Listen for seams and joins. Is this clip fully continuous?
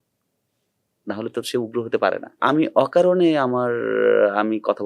no; 1 cut; at 2.4 s

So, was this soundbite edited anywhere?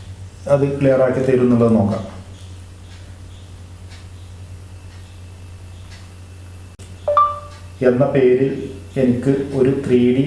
yes; 1 cut; at 6.8 s

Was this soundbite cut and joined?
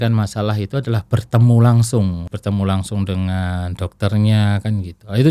yes; 1 cut; at 2.3 s

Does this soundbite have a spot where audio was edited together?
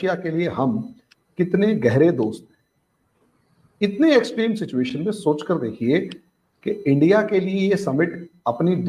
no; 0 cuts

